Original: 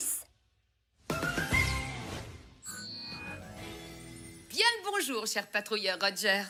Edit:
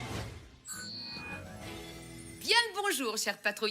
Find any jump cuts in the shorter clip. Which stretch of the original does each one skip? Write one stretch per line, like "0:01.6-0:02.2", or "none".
0:04.3-0:04.5